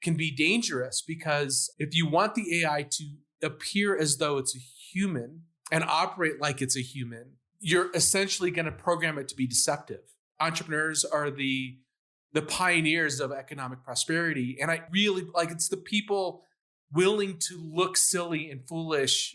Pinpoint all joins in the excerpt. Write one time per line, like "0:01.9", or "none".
0:10.2

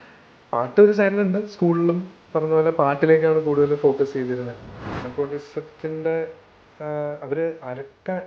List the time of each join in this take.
0:04.9

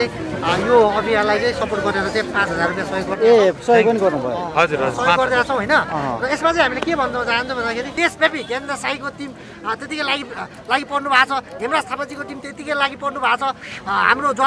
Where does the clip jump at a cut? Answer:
0:07.9

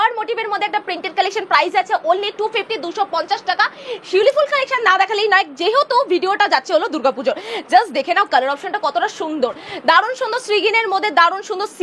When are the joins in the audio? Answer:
none

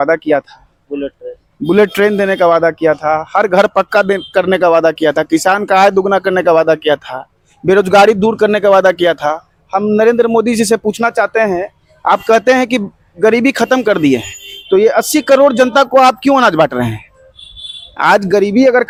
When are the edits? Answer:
none

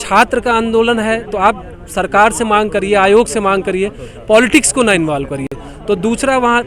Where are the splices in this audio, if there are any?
none

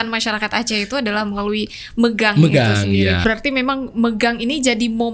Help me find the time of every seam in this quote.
0:03.2

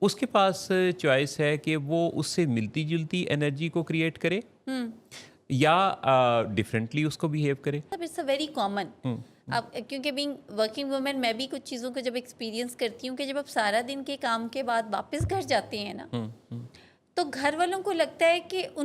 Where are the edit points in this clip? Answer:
0:07.9

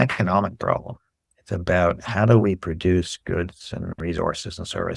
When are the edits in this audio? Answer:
0:04.0

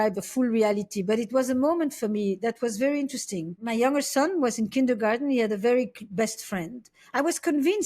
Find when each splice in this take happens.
0:03.6

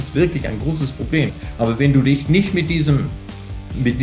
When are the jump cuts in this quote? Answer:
0:01.4

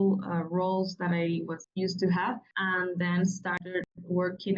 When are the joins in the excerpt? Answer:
0:01.6
0:02.5

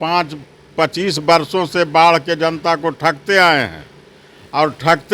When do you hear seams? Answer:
none

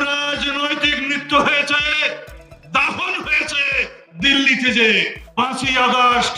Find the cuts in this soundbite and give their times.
0:05.2

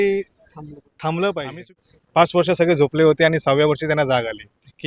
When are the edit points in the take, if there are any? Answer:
0:01.6

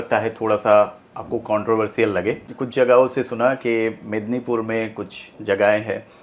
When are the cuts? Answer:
0:02.5

